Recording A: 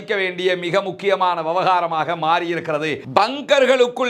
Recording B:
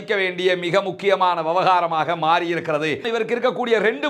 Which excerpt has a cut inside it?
B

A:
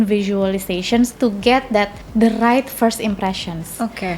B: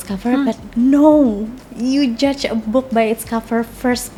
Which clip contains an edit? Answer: A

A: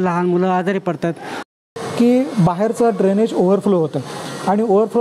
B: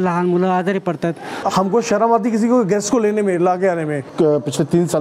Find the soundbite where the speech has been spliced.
B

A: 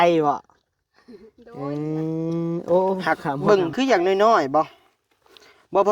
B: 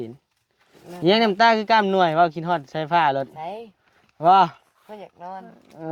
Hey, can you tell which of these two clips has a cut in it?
A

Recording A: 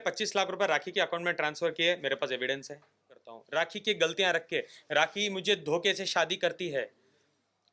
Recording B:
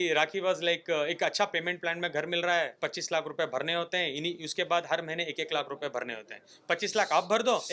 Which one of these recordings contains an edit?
A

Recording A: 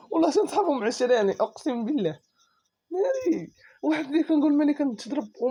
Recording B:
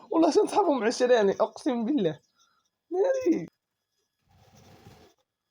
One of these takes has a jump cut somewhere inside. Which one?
B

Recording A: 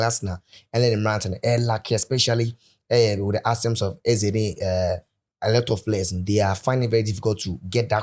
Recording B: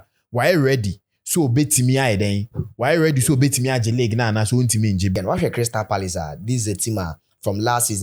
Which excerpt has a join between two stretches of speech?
B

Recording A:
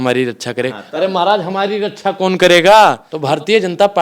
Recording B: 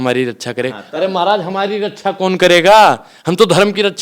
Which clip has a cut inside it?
A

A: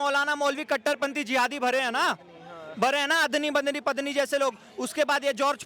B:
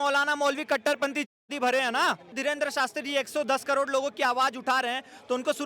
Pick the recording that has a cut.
B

